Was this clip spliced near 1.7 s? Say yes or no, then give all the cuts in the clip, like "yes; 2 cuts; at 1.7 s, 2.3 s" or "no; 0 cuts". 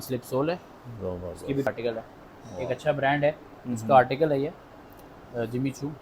yes; 1 cut; at 1.7 s